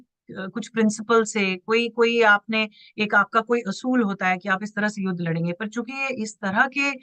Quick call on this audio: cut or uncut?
uncut